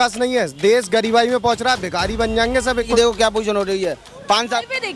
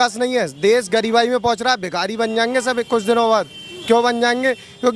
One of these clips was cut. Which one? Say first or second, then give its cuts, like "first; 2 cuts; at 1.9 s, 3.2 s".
first; 1 cut; at 2.9 s